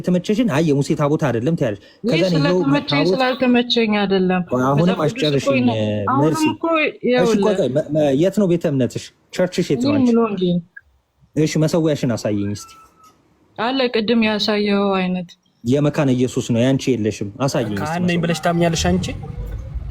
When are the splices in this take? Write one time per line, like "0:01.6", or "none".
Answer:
0:17.8